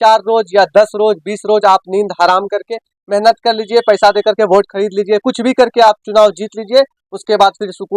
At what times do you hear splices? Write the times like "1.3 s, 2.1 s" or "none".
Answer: none

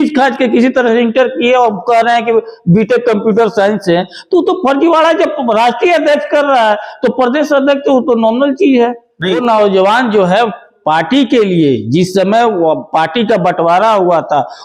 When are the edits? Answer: 9.4 s

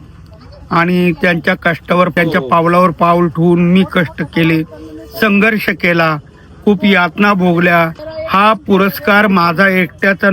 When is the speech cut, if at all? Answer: 8.0 s

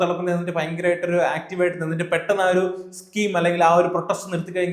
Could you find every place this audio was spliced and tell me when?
none

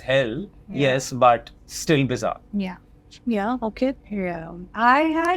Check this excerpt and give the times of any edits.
none

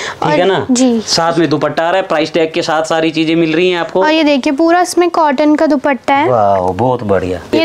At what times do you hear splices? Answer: none

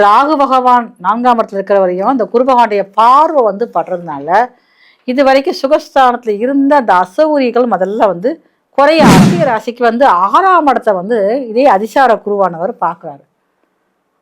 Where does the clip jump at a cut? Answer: 9.4 s

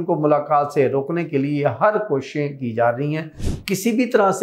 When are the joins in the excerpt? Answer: 3.5 s

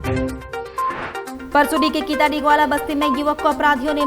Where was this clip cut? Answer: 1.4 s

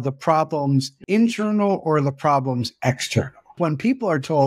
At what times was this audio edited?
1.0 s, 3.5 s

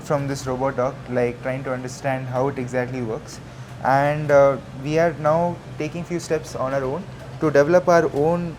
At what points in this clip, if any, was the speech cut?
none

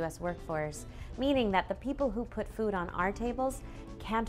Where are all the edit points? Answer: none

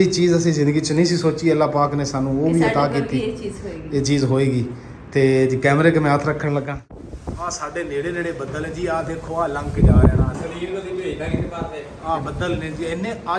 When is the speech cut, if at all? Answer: 6.7 s

